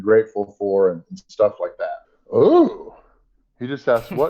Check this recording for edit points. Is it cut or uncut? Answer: cut